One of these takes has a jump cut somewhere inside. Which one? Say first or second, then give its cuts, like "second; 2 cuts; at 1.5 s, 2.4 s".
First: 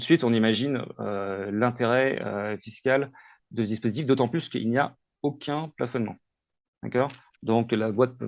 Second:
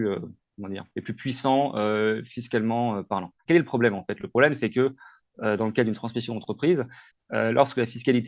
second; 1 cut; at 3.3 s